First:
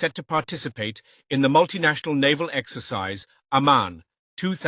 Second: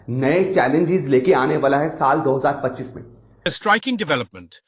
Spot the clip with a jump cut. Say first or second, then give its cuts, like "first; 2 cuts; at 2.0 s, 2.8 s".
second; 1 cut; at 3.5 s